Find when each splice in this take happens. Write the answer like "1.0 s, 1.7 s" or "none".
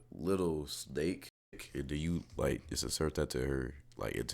1.6 s